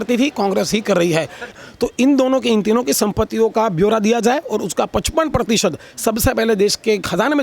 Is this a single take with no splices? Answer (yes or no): no